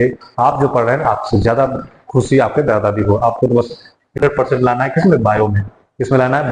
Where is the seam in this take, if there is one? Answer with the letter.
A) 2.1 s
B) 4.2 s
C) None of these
B